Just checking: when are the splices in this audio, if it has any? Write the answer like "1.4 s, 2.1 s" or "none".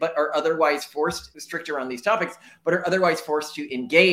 none